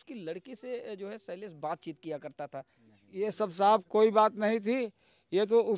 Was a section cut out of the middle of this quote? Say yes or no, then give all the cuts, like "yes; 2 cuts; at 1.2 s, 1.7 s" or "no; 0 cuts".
no; 0 cuts